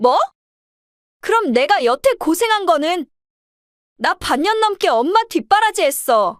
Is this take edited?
no; 0 cuts

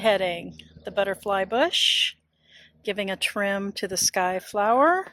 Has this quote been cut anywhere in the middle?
no; 0 cuts

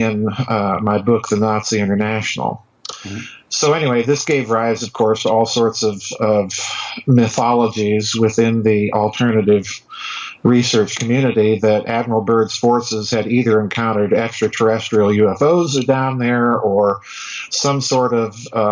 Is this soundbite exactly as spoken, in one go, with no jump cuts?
no; 1 cut; at 15.3 s

